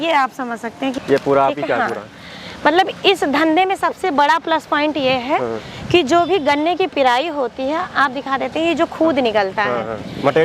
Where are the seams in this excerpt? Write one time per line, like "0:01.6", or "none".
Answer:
0:00.9